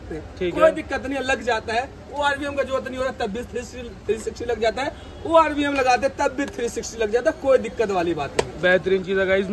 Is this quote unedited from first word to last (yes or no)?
yes